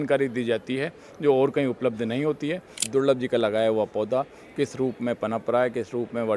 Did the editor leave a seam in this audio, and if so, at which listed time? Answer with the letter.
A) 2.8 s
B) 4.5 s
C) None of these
A